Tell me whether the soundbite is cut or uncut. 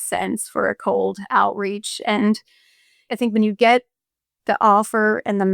cut